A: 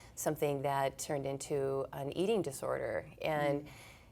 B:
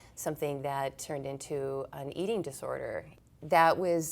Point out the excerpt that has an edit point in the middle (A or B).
B